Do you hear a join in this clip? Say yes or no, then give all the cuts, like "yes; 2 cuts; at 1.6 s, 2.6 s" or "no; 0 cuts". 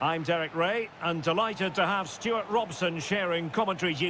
no; 0 cuts